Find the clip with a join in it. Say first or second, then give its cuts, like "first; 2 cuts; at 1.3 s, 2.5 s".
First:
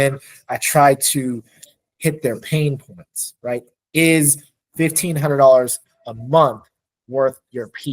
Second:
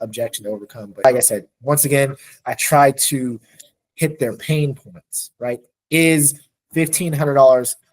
second; 1 cut; at 1.0 s